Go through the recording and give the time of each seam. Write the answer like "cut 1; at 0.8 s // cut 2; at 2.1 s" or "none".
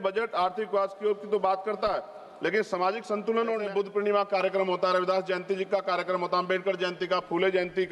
cut 1; at 3.6 s